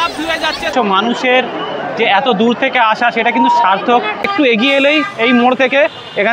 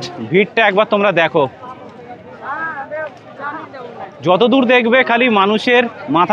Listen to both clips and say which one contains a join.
first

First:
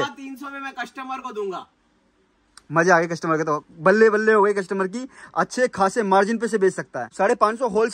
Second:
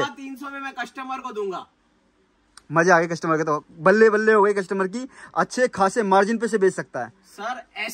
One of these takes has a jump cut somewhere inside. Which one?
first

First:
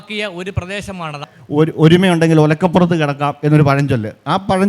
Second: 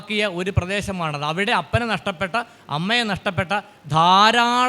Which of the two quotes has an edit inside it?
first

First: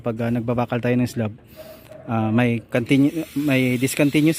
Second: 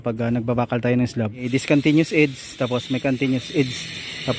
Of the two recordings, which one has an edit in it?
second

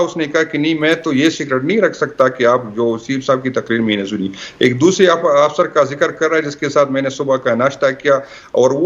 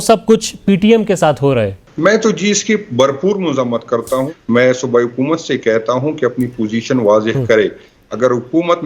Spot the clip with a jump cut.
second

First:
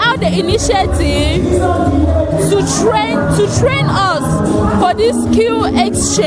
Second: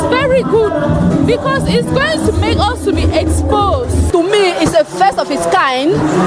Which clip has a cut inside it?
second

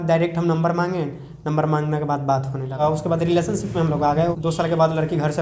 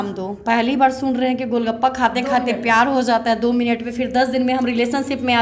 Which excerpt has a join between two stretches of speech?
first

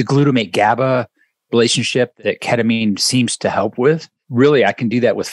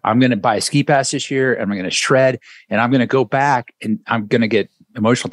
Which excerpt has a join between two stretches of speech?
first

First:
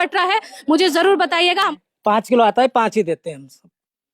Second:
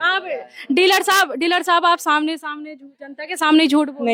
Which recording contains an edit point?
first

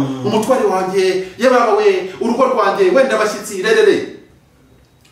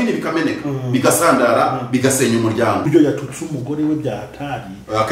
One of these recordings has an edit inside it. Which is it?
second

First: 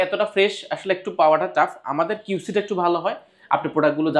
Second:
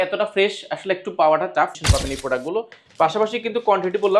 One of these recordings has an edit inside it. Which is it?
second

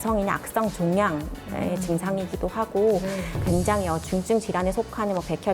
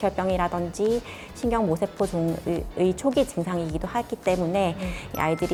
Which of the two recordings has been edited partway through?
first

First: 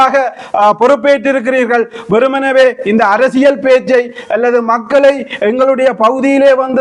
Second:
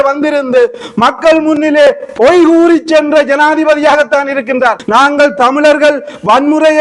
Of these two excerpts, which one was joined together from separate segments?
second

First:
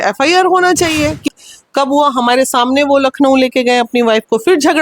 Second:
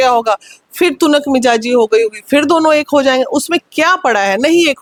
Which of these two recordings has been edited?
first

